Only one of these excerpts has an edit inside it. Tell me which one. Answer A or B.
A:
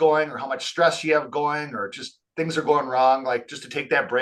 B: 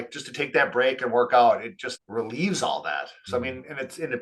B